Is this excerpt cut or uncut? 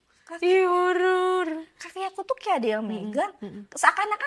uncut